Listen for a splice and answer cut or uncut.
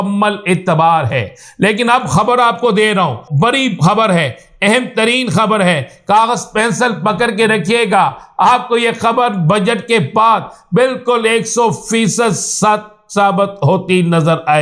cut